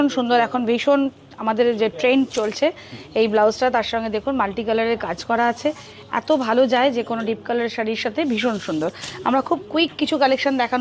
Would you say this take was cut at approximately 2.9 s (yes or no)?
no